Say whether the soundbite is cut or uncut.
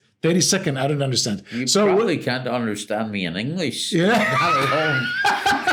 uncut